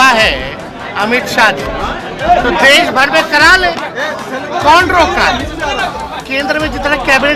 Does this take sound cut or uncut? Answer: cut